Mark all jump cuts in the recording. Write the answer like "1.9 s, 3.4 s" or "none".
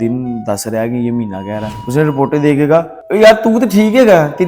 1.8 s